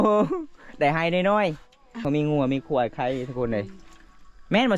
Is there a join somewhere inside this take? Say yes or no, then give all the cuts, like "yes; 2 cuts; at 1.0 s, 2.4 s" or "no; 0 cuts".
yes; 1 cut; at 2.0 s